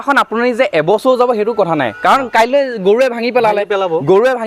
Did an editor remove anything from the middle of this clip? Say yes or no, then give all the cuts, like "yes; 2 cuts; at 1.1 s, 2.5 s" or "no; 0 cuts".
no; 0 cuts